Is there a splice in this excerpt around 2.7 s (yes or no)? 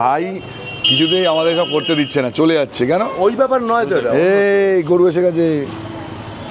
no